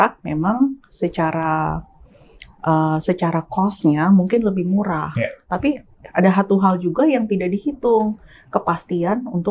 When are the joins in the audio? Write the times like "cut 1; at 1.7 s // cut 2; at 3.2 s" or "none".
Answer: none